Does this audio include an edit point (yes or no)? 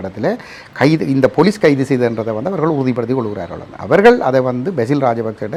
no